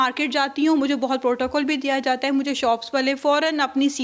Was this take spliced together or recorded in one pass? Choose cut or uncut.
uncut